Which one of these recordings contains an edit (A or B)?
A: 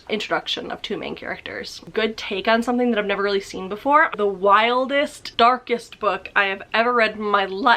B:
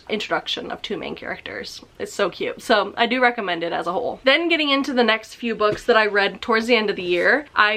A